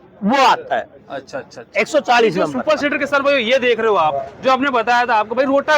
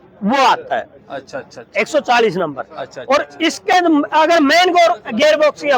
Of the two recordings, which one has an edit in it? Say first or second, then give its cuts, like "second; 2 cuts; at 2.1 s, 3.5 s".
first; 1 cut; at 2.6 s